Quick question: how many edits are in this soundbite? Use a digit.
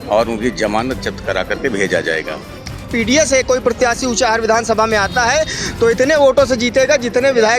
1